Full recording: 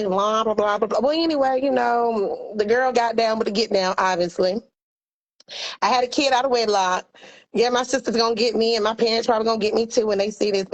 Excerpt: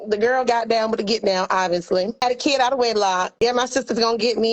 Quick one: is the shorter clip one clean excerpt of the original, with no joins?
no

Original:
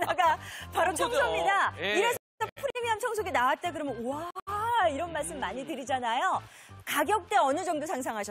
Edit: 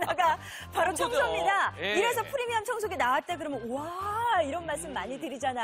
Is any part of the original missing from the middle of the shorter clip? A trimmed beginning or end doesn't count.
yes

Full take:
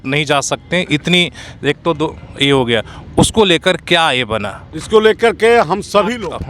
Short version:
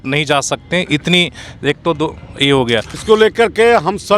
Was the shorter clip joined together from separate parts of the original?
yes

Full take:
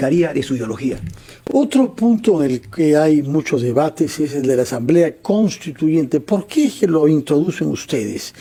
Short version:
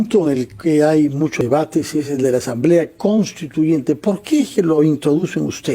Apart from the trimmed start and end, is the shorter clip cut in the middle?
yes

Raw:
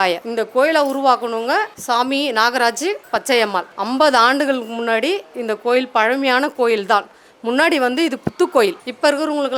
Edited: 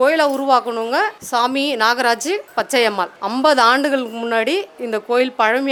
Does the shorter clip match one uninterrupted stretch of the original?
yes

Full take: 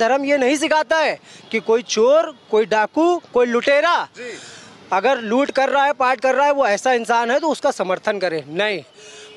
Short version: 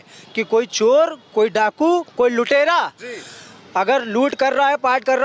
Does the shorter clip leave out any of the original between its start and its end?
no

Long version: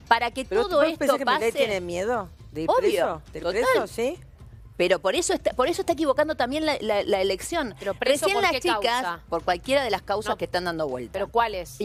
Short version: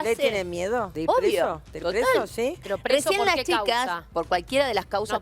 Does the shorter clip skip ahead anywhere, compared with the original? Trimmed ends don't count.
yes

